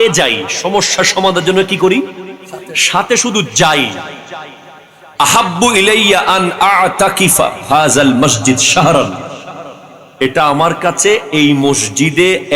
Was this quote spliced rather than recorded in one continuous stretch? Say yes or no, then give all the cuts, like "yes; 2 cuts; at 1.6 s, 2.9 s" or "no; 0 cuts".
no; 0 cuts